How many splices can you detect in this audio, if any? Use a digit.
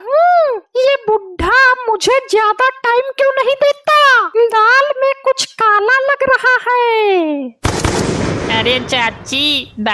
1